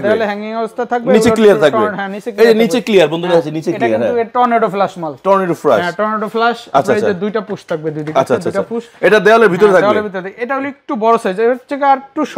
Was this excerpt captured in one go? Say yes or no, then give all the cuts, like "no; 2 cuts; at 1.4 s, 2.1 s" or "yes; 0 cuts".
yes; 0 cuts